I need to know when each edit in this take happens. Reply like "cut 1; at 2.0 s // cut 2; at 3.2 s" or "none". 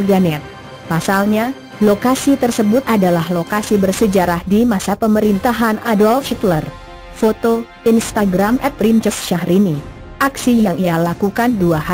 none